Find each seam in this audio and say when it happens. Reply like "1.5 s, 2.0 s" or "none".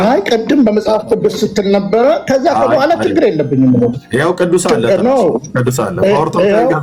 none